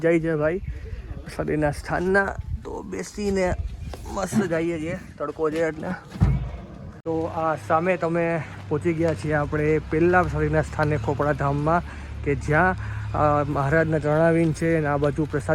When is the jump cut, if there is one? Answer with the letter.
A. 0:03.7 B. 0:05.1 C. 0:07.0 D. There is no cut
C